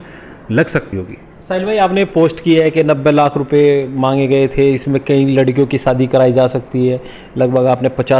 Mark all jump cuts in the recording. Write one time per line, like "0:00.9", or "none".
0:00.9